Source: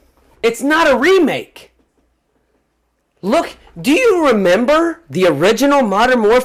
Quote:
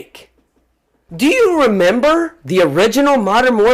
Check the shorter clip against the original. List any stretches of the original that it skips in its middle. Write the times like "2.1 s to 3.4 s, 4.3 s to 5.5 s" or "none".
2.4 s to 3.6 s